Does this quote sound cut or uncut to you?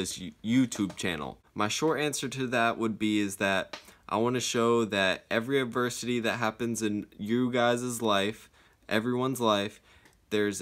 cut